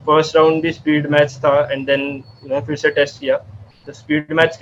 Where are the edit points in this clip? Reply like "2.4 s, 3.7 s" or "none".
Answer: none